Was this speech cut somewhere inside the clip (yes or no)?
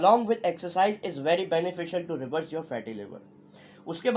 no